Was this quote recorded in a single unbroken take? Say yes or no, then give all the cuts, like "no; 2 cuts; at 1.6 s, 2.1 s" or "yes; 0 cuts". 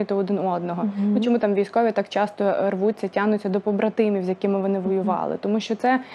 yes; 0 cuts